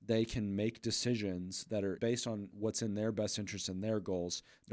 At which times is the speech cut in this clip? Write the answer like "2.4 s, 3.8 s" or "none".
2.5 s